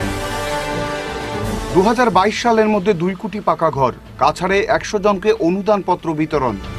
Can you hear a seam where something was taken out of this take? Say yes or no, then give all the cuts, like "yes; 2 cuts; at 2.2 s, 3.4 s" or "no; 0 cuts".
yes; 1 cut; at 1.5 s